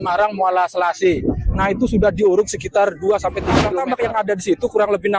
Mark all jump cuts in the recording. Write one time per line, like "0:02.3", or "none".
0:03.7